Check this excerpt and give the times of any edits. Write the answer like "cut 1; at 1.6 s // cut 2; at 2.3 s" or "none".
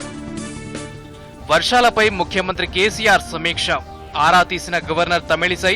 cut 1; at 1.3 s

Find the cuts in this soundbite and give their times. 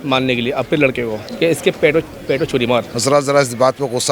cut 1; at 1.2 s // cut 2; at 2.9 s

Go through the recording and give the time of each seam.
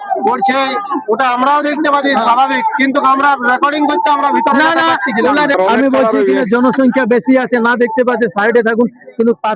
cut 1; at 5.6 s

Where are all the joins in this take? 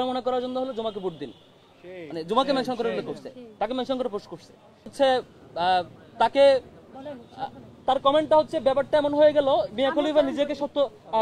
cut 1; at 4.9 s

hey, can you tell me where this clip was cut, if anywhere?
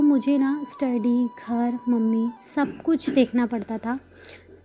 none

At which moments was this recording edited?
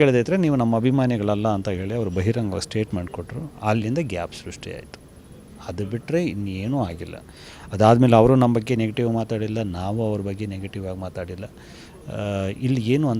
none

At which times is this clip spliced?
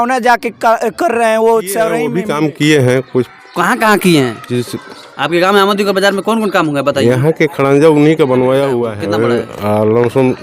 cut 1; at 2.1 s // cut 2; at 8.9 s

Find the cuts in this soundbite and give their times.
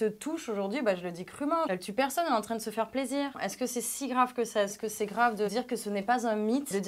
cut 1; at 1.7 s // cut 2; at 3.4 s

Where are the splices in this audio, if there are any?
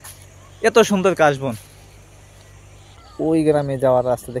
cut 1; at 3.0 s

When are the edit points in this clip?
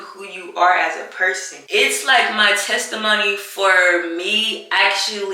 cut 1; at 1.6 s

